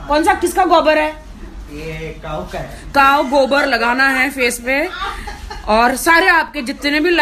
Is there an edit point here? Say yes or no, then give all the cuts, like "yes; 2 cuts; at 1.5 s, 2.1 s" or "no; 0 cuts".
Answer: no; 0 cuts